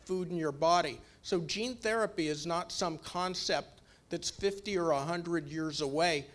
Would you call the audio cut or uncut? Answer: uncut